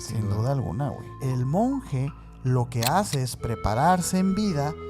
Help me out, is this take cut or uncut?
cut